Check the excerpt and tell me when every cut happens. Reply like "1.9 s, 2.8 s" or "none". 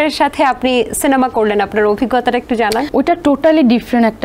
2.9 s